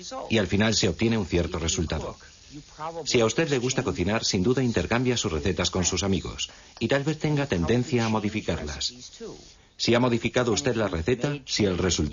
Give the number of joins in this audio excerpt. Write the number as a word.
zero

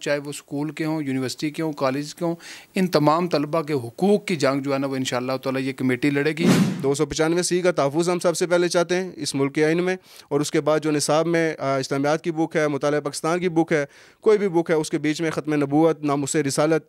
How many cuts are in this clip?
one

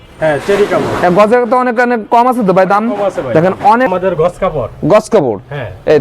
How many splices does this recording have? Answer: one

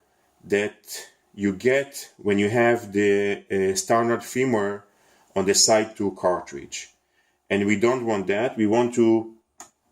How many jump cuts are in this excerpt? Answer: one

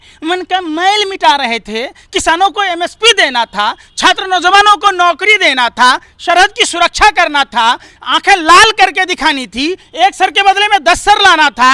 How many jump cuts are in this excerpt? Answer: zero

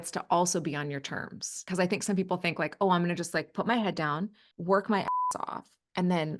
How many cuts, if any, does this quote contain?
two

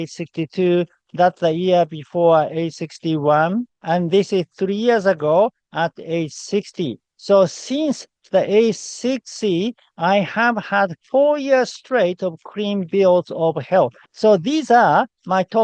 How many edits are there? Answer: two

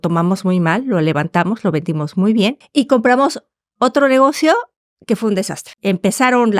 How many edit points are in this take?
two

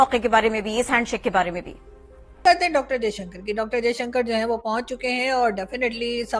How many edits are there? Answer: one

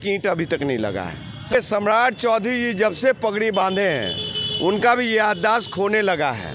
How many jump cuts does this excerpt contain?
one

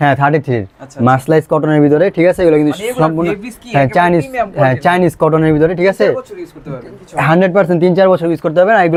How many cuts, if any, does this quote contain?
zero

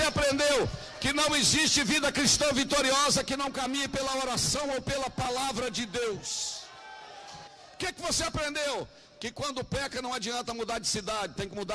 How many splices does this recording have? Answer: one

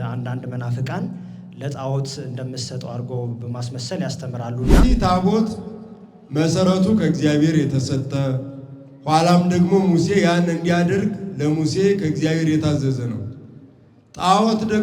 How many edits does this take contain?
one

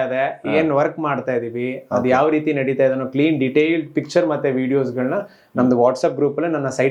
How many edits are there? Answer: zero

